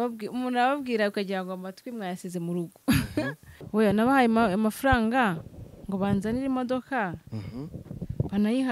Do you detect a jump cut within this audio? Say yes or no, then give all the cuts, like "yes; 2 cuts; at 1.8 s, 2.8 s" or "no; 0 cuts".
yes; 1 cut; at 3.5 s